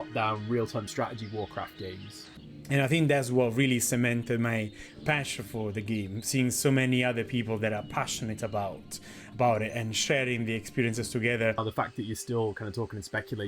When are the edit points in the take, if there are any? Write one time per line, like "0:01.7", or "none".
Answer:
0:02.3
0:11.7